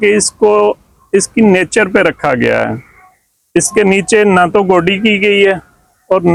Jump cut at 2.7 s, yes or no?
no